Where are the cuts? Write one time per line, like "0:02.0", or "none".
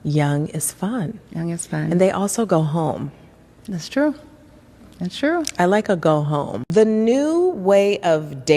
0:06.4